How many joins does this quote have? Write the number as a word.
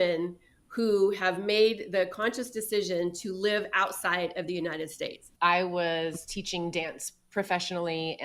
one